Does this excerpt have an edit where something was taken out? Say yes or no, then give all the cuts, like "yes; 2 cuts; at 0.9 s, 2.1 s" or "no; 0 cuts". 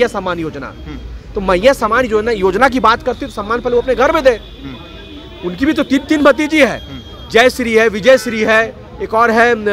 no; 0 cuts